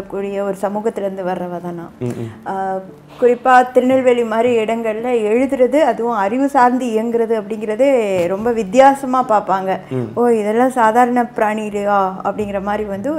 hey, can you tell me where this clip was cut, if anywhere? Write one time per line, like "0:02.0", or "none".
none